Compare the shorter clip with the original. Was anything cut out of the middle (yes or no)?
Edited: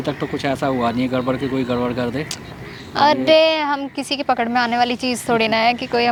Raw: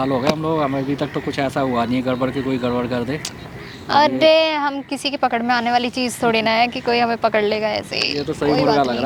no